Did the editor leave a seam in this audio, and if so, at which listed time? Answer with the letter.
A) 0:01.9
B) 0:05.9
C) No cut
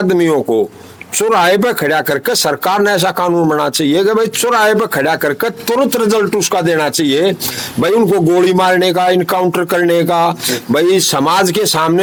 C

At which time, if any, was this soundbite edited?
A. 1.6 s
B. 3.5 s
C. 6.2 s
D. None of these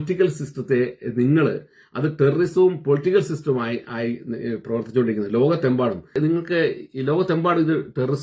C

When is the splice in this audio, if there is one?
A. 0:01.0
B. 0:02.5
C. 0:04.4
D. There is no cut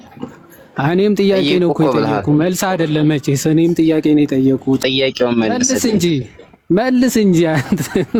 D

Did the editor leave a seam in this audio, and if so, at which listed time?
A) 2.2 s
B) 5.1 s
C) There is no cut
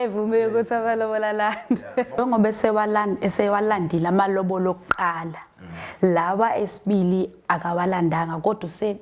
A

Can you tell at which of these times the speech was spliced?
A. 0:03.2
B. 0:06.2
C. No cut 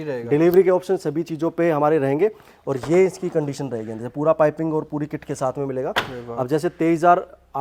C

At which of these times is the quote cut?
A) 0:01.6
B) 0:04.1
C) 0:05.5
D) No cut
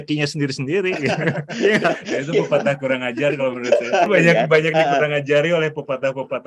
B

